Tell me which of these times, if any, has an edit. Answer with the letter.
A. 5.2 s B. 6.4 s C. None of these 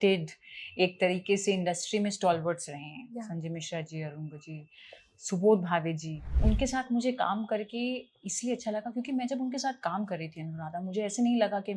B